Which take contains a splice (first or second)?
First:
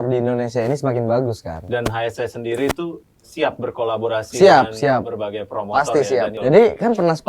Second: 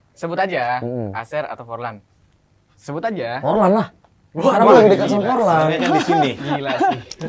first